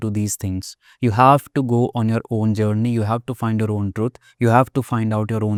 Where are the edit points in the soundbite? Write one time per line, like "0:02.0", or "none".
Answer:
none